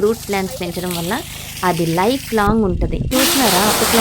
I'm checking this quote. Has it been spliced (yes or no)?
yes